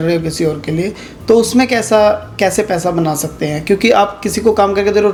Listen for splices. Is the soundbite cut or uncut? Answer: uncut